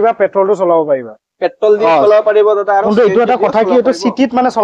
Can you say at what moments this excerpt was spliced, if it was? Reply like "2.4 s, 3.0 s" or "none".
none